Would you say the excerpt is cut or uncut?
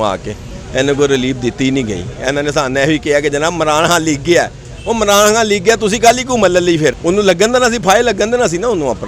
cut